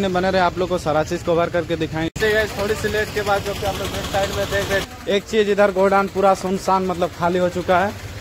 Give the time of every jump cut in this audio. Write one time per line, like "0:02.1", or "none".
0:02.1
0:04.9